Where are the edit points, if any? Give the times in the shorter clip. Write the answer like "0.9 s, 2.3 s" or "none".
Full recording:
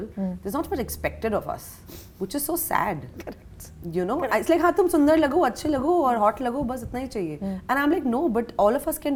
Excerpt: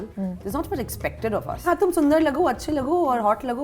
1.6 s